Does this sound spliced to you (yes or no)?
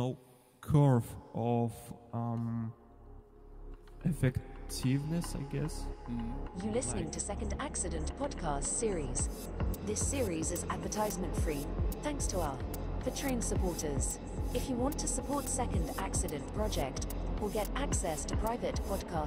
yes